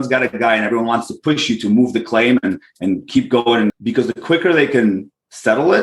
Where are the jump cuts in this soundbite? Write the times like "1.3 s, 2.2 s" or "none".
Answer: 3.7 s